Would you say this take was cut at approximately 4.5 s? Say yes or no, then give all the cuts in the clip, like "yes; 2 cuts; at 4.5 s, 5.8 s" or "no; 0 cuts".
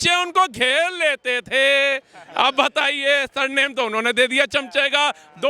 no; 0 cuts